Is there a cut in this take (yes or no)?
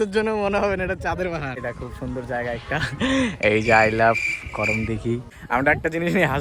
yes